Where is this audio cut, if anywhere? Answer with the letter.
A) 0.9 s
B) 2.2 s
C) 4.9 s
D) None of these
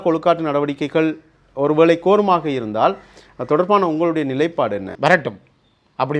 C